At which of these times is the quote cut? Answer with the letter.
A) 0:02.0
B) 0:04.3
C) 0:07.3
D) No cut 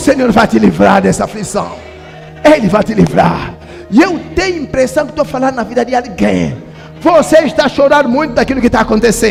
D